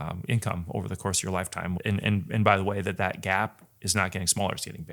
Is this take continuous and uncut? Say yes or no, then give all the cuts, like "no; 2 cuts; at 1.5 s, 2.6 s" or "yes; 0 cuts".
no; 1 cut; at 1.8 s